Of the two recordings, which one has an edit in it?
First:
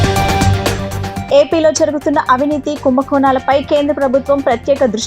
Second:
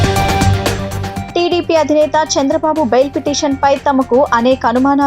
second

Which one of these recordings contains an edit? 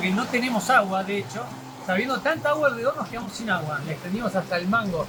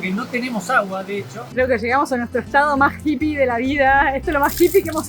second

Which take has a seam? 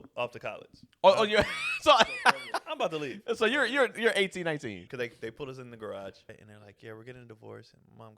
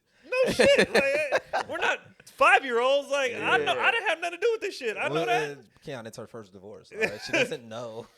first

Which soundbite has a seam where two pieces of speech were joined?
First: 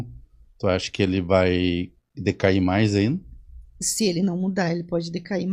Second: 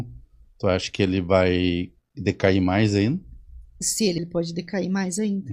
second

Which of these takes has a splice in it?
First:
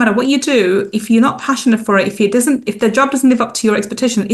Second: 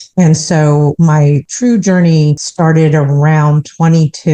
second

